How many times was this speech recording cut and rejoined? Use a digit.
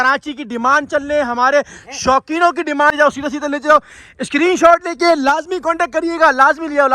1